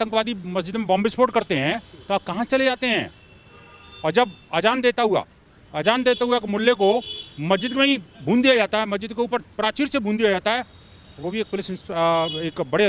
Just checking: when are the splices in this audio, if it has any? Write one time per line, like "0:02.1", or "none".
none